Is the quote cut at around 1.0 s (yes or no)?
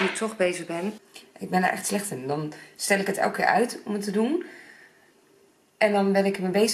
yes